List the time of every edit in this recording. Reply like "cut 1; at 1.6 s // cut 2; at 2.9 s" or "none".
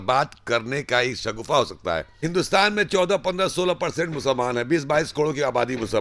cut 1; at 2.3 s